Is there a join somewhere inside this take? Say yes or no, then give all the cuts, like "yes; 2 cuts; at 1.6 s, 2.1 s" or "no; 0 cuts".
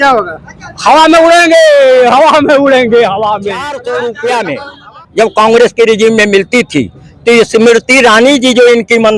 yes; 1 cut; at 3.7 s